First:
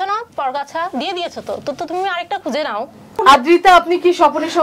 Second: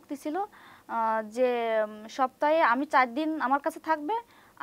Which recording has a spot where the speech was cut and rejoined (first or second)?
first